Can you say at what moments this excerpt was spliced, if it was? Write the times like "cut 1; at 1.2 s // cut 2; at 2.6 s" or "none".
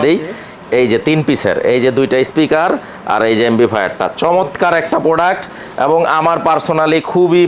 none